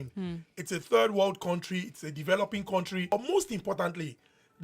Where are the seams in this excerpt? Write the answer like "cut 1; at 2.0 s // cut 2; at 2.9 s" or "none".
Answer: cut 1; at 3.1 s